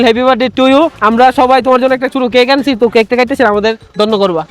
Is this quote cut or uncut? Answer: cut